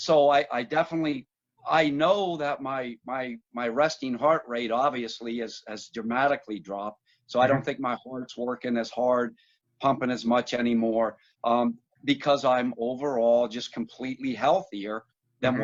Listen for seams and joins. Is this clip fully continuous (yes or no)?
yes